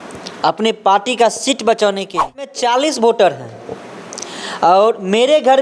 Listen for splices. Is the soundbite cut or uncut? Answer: cut